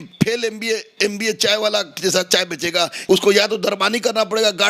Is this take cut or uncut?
cut